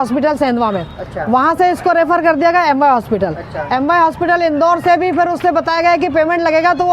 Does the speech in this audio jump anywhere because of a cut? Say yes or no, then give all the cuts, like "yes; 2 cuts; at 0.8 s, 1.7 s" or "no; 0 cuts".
no; 0 cuts